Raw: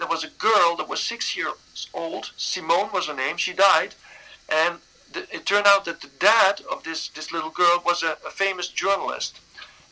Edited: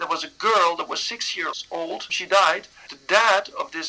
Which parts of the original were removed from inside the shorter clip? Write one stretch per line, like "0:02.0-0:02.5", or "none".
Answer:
0:01.9-0:03.2
0:04.2-0:06.0